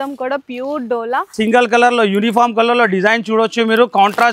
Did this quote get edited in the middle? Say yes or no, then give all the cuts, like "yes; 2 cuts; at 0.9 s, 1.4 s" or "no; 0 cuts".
yes; 1 cut; at 1.3 s